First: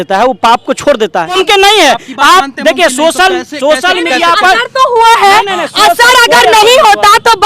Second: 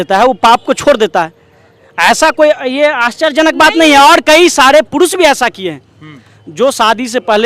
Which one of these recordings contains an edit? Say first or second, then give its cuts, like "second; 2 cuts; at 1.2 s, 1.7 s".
first; 1 cut; at 1.4 s